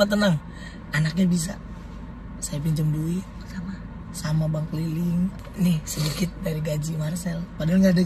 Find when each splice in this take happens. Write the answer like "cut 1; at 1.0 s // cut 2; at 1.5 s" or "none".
cut 1; at 5.4 s